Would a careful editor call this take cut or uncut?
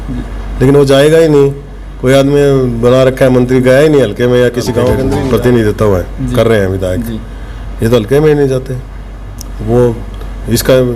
cut